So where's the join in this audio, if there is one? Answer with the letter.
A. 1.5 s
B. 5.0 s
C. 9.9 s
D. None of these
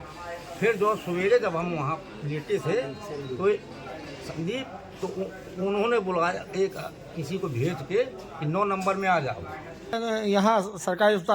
C